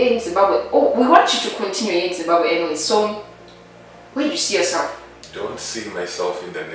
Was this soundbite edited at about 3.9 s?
no; 1 cut; at 5.2 s

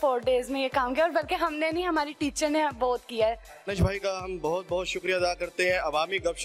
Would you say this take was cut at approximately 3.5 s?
yes; 1 cut; at 3.5 s

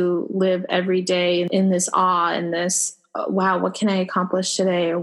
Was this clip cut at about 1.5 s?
yes; 1 cut; at 1.5 s

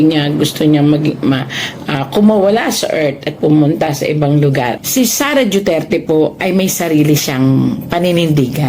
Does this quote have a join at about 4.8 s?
yes; 1 cut; at 4.8 s

